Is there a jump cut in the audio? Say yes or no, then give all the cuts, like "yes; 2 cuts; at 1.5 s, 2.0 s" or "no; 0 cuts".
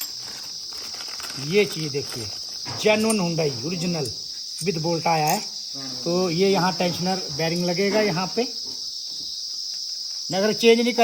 no; 0 cuts